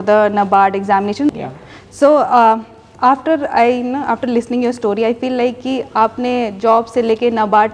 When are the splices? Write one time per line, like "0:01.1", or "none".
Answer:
0:01.3